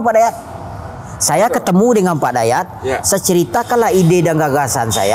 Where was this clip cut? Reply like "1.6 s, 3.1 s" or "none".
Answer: none